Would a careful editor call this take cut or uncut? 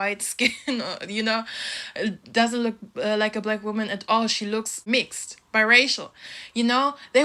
uncut